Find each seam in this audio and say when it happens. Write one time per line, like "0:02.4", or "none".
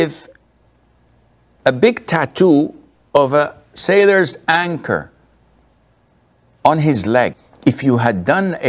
0:07.5